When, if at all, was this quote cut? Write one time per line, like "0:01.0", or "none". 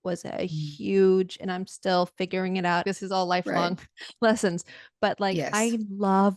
0:02.8

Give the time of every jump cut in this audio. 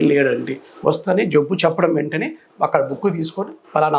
none

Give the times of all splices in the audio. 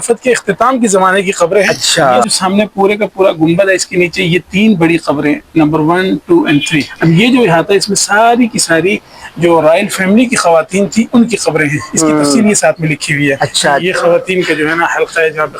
0:02.3
0:06.9
0:13.8

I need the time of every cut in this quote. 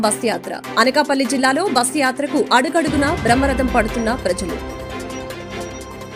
none

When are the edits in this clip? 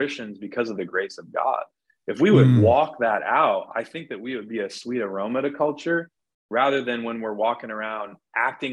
none

